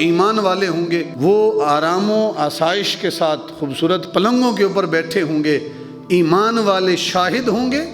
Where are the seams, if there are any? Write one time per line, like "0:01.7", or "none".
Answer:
0:01.1